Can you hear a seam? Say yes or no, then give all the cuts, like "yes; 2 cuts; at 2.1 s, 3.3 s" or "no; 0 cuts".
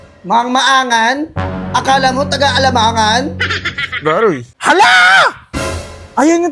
yes; 1 cut; at 4.5 s